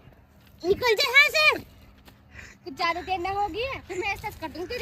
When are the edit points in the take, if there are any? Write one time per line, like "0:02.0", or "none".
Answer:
none